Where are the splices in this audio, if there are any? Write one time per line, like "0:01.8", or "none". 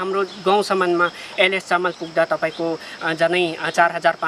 none